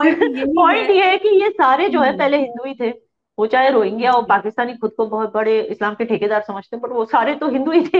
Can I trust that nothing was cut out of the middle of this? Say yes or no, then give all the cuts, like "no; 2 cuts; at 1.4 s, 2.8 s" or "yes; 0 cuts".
yes; 0 cuts